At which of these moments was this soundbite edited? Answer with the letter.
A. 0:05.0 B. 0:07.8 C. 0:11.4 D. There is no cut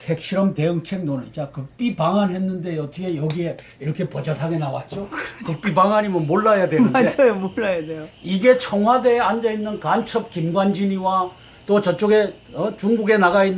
A